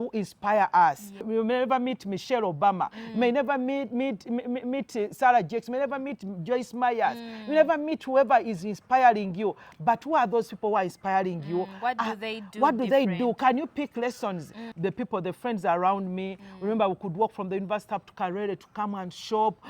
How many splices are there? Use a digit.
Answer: 2